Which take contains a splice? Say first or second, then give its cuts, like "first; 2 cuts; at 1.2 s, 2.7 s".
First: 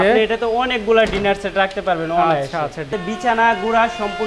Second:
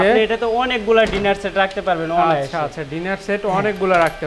first; 1 cut; at 2.9 s